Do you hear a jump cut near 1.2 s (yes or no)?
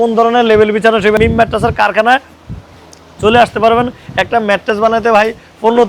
yes